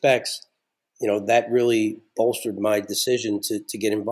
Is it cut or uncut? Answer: uncut